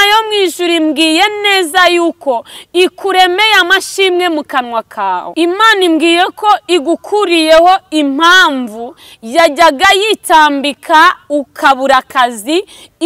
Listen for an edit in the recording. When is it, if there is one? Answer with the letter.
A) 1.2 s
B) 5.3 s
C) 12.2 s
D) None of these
B